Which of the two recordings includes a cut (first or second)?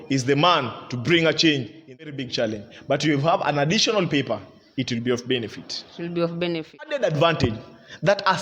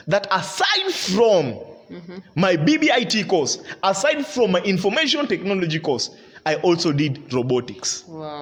first